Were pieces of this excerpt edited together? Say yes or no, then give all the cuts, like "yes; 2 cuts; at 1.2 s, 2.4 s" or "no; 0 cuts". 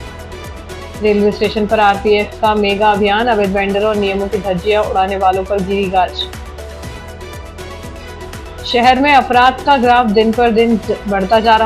yes; 1 cut; at 1.0 s